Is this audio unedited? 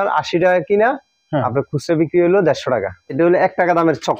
no; 1 cut; at 3.1 s

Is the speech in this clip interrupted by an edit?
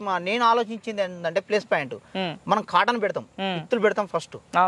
no; 0 cuts

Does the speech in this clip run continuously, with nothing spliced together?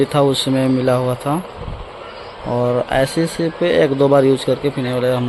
yes; 0 cuts

